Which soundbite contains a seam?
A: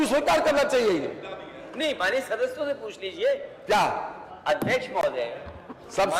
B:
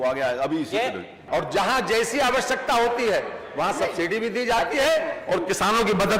B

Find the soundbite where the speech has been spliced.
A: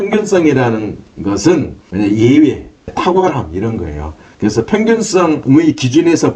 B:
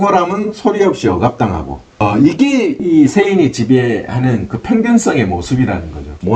A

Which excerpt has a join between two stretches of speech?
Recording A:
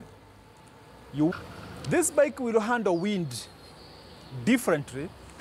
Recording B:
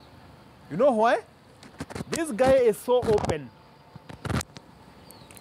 A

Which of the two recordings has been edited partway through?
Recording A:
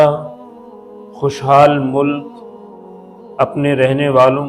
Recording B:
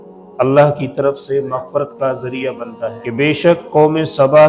B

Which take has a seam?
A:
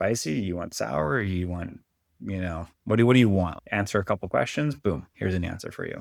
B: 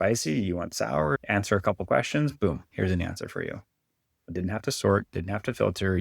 B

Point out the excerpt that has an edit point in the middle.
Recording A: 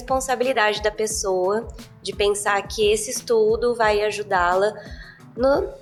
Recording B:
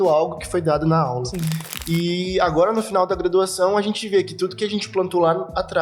B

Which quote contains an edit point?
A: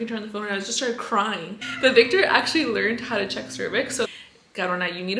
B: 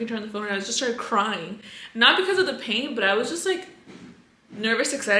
A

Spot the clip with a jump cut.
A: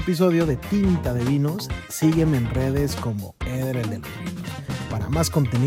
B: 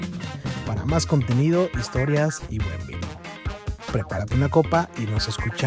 B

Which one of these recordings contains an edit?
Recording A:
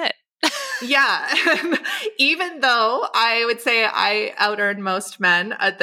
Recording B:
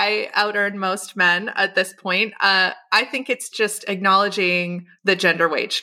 B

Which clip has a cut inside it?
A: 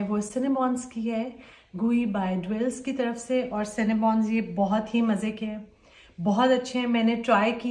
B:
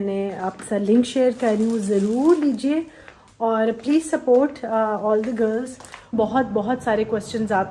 B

